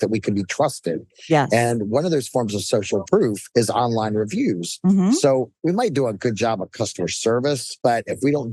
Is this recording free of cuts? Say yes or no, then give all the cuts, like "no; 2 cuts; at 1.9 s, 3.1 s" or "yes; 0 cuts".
no; 3 cuts; at 3.1 s, 5.5 s, 7.7 s